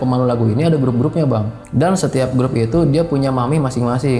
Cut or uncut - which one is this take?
cut